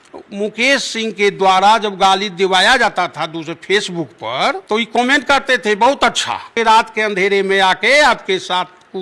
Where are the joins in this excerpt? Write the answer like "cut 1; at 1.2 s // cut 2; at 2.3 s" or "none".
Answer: cut 1; at 4.6 s // cut 2; at 6.5 s